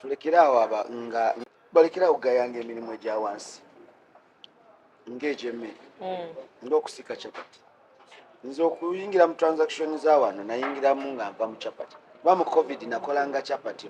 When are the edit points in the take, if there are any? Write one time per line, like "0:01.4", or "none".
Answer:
0:01.5